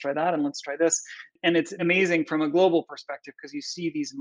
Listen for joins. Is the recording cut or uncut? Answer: cut